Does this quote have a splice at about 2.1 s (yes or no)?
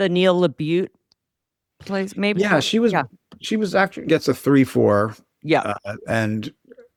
no